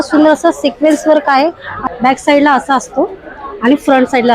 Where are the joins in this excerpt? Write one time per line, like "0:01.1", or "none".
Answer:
0:01.7